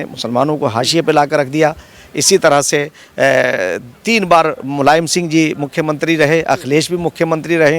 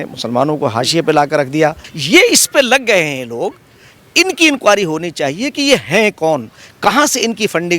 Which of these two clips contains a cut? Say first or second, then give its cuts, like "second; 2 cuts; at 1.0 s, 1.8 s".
second; 1 cut; at 1.9 s